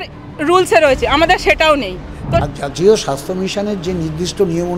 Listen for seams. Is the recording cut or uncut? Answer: cut